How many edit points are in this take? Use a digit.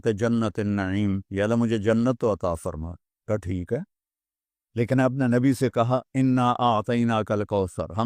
1